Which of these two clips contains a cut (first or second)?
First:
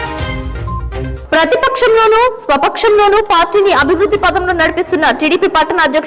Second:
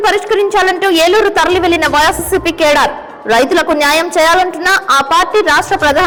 first